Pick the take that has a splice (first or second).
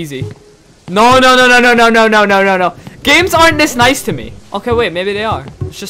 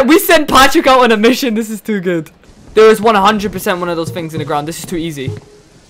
second